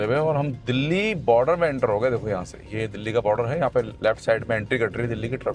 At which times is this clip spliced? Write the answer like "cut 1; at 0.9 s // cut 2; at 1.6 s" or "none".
none